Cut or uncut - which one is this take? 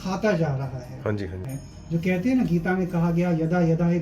cut